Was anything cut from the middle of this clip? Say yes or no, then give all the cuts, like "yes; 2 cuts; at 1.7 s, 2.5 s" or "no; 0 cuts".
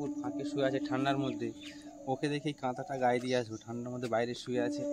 no; 0 cuts